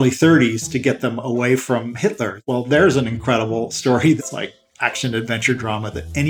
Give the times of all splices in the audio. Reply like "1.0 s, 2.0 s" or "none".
2.4 s, 4.2 s